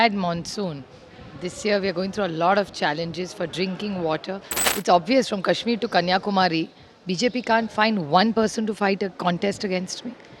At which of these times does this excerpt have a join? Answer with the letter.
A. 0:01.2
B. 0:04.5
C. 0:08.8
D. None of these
B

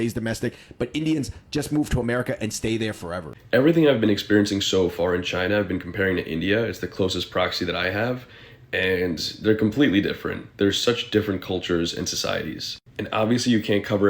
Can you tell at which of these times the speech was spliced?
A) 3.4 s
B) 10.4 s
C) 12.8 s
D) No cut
A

